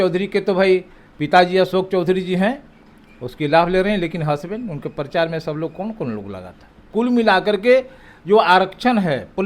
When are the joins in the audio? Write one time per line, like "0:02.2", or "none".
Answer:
0:06.9